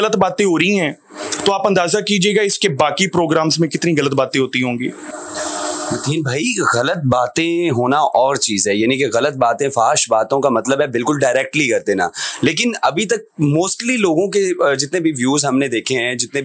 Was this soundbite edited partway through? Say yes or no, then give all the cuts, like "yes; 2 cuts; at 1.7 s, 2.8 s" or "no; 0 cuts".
no; 0 cuts